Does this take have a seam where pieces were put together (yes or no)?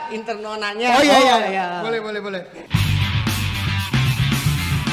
yes